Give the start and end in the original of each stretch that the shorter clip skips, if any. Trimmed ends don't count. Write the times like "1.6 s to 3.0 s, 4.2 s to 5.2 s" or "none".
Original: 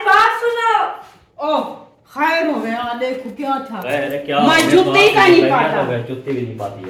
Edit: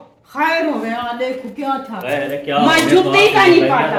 none